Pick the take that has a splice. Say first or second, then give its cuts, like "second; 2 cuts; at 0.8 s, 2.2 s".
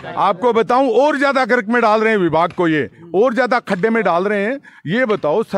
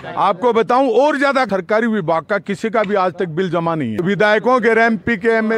second; 2 cuts; at 1.5 s, 4.0 s